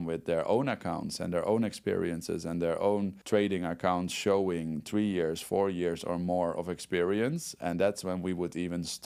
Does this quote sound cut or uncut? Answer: uncut